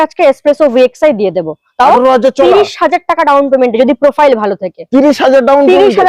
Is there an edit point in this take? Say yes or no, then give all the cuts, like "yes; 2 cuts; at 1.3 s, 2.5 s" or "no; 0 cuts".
no; 0 cuts